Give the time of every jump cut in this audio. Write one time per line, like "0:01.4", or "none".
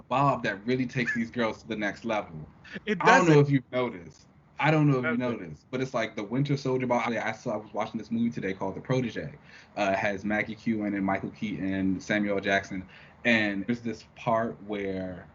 0:07.1
0:13.7